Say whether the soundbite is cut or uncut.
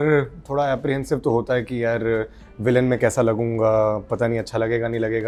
uncut